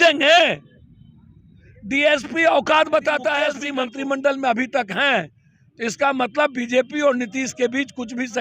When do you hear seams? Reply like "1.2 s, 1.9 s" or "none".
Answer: 3.6 s